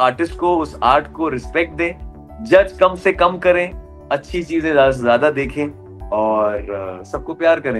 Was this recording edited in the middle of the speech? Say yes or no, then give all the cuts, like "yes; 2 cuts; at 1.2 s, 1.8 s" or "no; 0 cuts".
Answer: no; 0 cuts